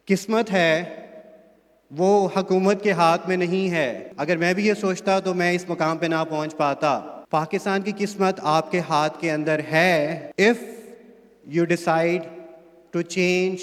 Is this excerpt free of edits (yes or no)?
no